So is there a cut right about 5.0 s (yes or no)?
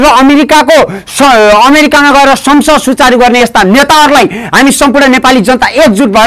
no